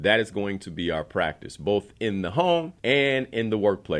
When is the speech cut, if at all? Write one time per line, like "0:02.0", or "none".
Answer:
0:02.7